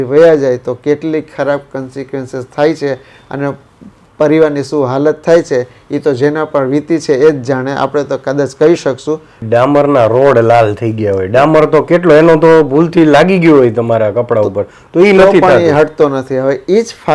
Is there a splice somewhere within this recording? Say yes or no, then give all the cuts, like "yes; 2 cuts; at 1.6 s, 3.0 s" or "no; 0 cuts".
yes; 1 cut; at 9.4 s